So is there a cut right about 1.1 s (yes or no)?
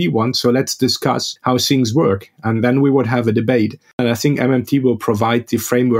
no